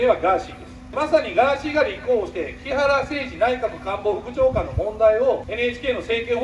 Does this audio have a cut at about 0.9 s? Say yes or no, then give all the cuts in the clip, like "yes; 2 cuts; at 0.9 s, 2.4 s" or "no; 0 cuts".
yes; 2 cuts; at 0.9 s, 5.5 s